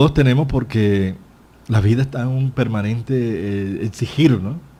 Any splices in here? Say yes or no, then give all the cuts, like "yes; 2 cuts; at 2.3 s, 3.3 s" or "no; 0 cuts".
no; 0 cuts